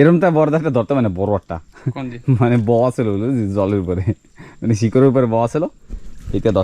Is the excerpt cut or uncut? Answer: uncut